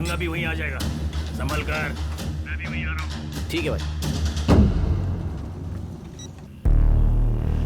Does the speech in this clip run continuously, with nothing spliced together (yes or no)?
yes